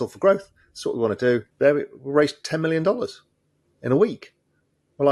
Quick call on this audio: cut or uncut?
cut